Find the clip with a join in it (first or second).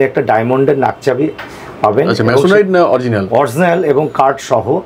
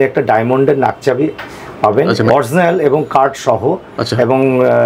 second